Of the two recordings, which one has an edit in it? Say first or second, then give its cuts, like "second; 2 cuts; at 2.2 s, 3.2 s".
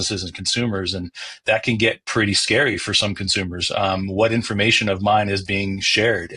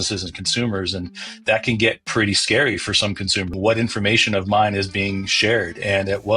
second; 1 cut; at 3.5 s